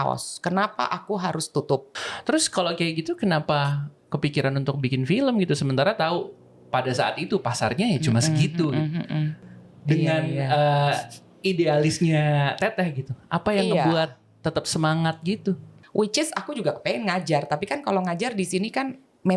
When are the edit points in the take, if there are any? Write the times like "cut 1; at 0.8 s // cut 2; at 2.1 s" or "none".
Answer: cut 1; at 1.9 s // cut 2; at 9.4 s // cut 3; at 15.7 s